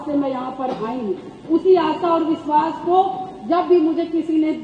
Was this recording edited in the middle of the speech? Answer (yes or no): no